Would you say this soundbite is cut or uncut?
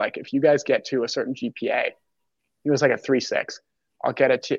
uncut